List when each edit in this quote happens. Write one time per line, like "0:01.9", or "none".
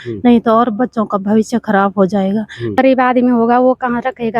0:02.8